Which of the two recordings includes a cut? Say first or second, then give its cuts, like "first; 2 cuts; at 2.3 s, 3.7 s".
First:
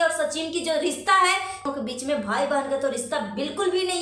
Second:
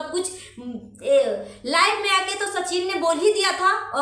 first; 1 cut; at 1.7 s